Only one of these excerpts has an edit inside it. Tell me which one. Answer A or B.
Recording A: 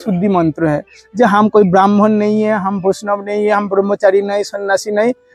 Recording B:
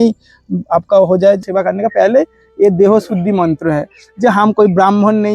B